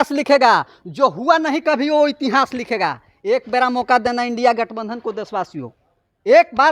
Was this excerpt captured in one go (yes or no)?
yes